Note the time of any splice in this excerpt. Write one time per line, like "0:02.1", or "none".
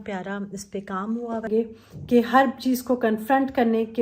0:01.5

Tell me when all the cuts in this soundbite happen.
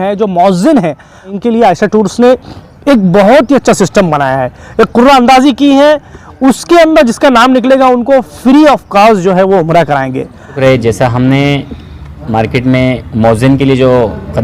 0:01.3
0:10.5

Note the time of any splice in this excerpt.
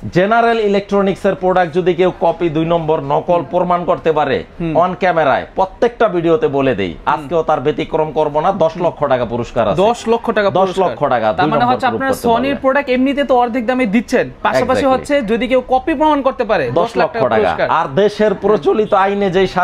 none

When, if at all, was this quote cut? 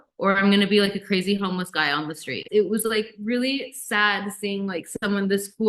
0:02.3

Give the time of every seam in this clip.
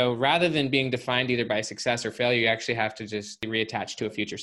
0:03.5

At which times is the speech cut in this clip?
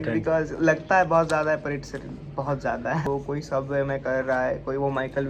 0:03.0

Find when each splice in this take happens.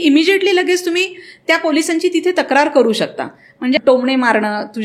0:03.8

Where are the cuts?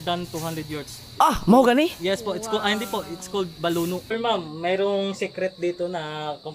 0:04.1

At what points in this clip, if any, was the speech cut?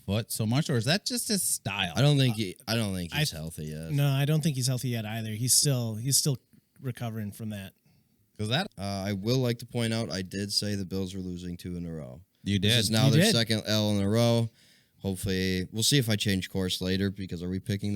0:08.7

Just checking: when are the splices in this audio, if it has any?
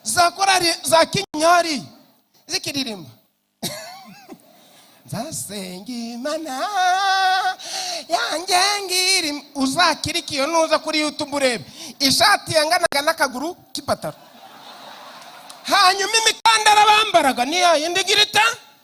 none

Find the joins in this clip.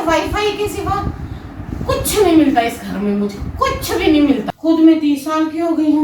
0:04.5

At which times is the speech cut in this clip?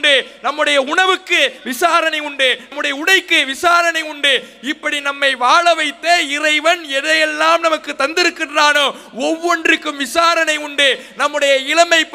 none

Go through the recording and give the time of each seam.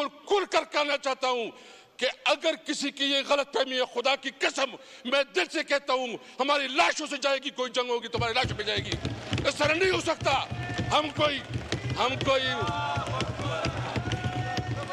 none

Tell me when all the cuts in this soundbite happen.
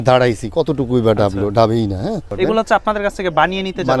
0:02.3

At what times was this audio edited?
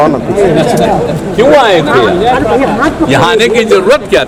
none

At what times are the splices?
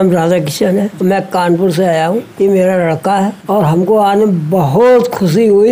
0:00.9
0:02.3
0:03.4

